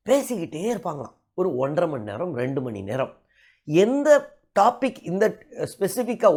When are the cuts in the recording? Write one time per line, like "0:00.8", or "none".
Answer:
none